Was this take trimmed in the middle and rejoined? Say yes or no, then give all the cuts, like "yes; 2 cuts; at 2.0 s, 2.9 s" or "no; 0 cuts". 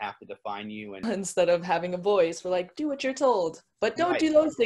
yes; 1 cut; at 1.0 s